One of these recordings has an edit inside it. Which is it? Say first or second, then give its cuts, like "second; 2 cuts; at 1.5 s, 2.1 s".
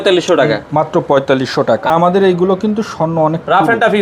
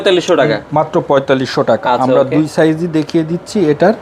first; 1 cut; at 1.9 s